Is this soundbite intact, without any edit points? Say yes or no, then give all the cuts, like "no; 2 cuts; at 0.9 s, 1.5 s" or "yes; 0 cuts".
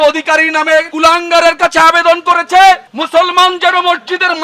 no; 1 cut; at 0.9 s